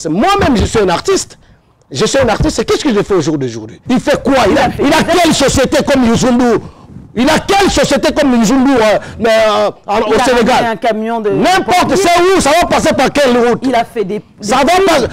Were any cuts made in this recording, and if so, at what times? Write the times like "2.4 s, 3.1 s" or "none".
3.7 s